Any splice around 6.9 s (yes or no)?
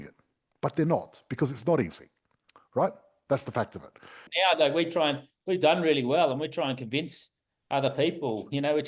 no